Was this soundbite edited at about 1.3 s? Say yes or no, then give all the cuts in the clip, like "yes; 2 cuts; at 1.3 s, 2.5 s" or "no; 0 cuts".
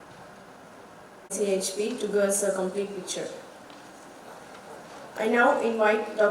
yes; 1 cut; at 1.3 s